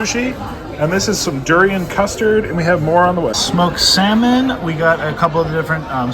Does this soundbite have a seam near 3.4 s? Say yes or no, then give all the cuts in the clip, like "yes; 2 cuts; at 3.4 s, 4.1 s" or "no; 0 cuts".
yes; 1 cut; at 3.4 s